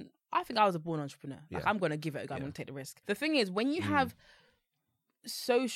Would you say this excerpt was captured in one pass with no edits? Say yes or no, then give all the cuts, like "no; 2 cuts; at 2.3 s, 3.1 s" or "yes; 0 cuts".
no; 1 cut; at 2.9 s